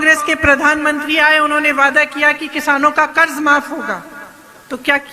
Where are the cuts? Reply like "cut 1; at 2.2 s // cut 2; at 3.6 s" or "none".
none